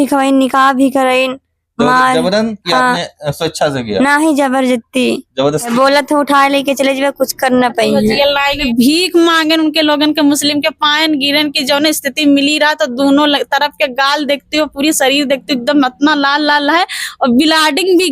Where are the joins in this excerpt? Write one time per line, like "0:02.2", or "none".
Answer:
0:05.7
0:08.6